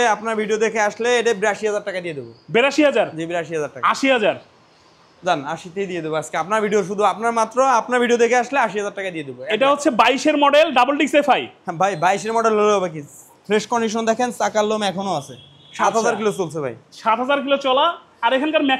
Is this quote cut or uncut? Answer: uncut